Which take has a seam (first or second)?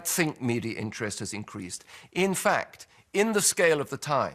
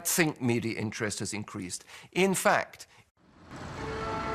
first